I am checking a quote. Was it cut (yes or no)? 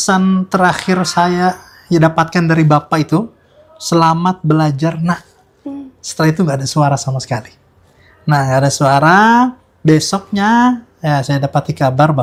no